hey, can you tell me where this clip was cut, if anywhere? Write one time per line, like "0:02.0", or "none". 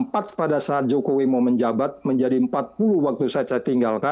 none